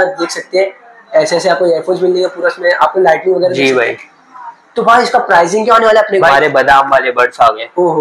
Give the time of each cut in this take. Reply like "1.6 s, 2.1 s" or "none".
6.1 s